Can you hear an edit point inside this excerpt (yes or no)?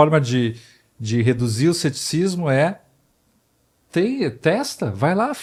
no